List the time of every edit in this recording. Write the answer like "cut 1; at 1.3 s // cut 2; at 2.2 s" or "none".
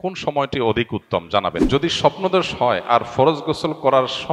cut 1; at 1.6 s

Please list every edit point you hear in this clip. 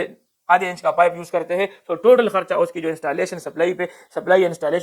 none

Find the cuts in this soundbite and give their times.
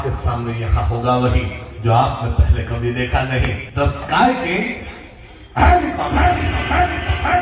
cut 1; at 3.6 s

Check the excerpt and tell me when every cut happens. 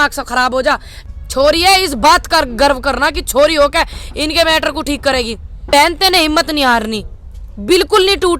cut 1; at 0.9 s // cut 2; at 5.7 s

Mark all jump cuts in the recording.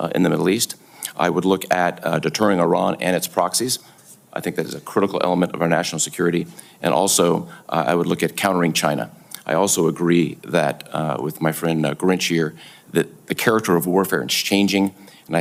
none

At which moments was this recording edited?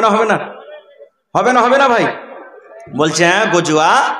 none

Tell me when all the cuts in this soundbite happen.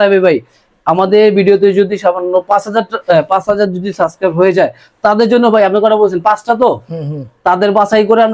none

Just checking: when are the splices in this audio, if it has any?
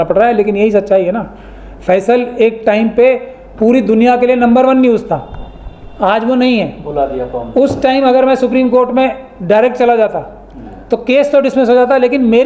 none

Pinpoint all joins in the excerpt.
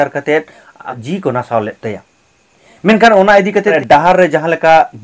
cut 1; at 1.0 s // cut 2; at 3.8 s

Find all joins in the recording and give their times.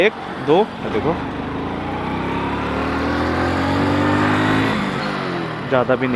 cut 1; at 5.0 s

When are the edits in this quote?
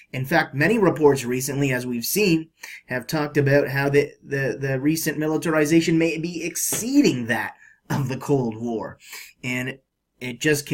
none

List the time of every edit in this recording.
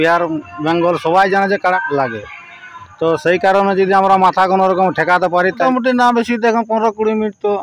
cut 1; at 1.8 s // cut 2; at 5.6 s

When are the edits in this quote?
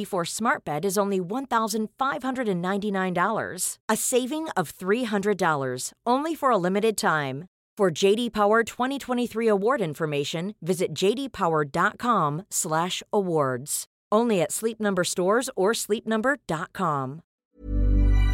cut 1; at 17.4 s

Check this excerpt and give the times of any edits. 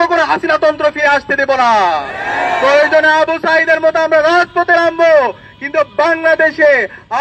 none

